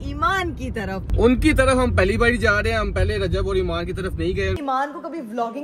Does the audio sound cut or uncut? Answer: cut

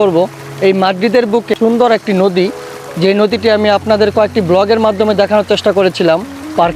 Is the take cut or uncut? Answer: uncut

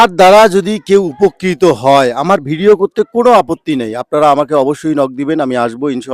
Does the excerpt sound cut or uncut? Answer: uncut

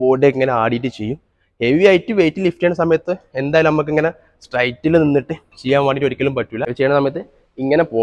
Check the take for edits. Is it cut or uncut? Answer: cut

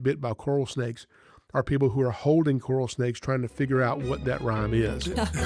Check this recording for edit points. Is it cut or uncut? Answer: uncut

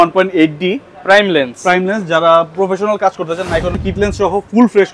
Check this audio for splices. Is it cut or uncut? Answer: cut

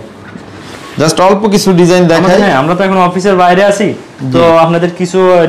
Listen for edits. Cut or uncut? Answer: uncut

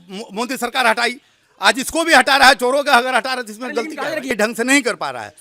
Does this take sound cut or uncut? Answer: cut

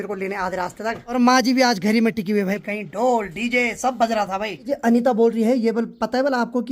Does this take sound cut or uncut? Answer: cut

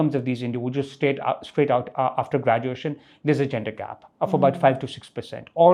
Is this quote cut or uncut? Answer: uncut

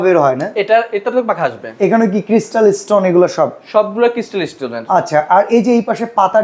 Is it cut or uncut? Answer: uncut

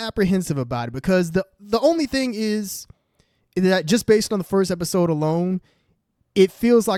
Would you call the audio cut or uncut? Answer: uncut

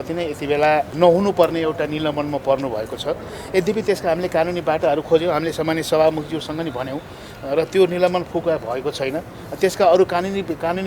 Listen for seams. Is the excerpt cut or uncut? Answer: cut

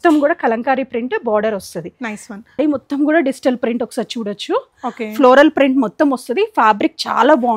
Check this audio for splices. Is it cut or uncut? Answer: cut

